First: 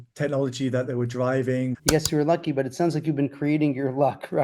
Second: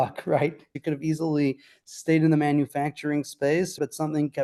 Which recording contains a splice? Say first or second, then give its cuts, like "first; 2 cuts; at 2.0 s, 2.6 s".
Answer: first; 1 cut; at 1.8 s